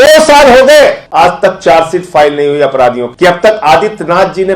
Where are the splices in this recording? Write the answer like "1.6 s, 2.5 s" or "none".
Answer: 1.0 s, 3.1 s